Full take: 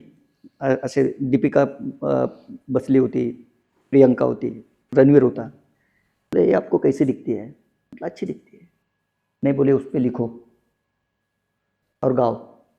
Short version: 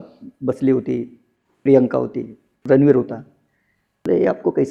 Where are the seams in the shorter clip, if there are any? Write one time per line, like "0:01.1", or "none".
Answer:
none